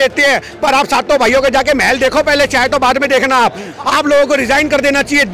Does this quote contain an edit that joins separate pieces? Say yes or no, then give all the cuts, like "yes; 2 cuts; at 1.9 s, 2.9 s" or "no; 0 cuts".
yes; 1 cut; at 3.7 s